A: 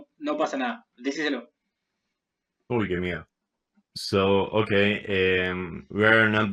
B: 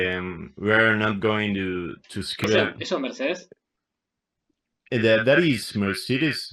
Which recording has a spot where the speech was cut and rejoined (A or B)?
B